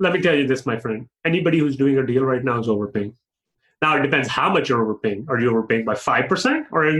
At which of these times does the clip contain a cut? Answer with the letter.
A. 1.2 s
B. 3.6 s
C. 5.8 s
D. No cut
D